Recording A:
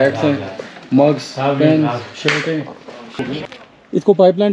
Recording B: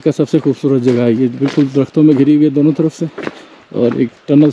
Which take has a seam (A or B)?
A